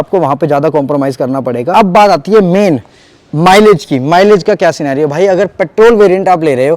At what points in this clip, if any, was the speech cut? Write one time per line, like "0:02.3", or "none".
0:01.7